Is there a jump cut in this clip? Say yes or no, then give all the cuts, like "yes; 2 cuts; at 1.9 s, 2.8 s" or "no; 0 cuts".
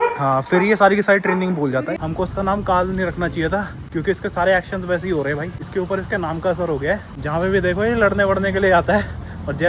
yes; 4 cuts; at 2.0 s, 3.8 s, 5.6 s, 7.1 s